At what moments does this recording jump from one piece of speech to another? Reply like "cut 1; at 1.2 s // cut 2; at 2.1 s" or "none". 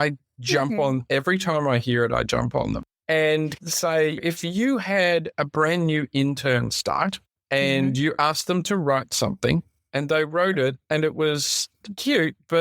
cut 1; at 2.9 s // cut 2; at 7.3 s